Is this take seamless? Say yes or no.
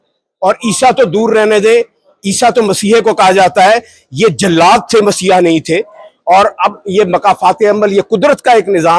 yes